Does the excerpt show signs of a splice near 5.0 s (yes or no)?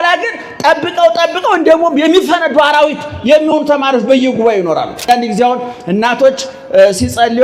yes